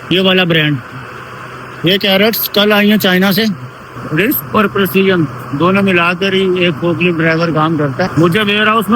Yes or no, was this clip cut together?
yes